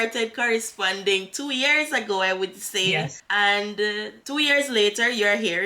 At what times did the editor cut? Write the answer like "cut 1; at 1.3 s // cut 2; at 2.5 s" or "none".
cut 1; at 3.2 s // cut 2; at 4.1 s